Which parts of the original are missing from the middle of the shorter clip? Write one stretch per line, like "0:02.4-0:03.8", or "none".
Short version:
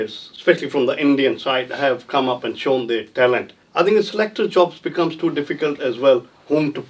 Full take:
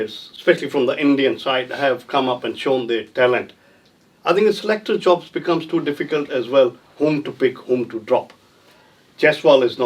0:03.6-0:04.1